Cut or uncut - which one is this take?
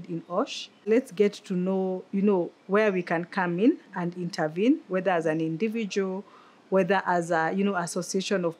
cut